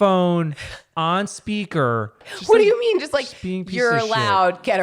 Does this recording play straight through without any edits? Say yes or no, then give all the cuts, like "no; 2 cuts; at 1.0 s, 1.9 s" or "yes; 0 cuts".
no; 1 cut; at 2.3 s